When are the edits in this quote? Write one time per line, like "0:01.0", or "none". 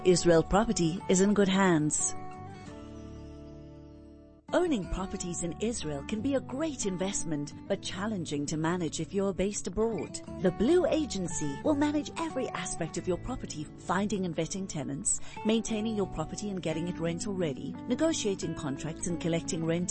0:01.9
0:04.3